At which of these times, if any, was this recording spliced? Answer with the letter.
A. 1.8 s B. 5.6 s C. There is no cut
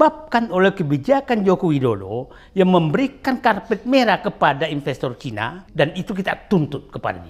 B